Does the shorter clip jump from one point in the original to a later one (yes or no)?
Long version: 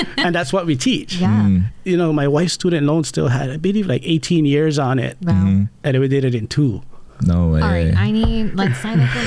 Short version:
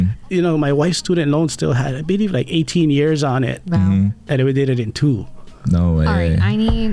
no